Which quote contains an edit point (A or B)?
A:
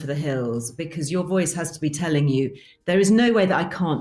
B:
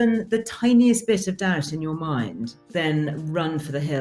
B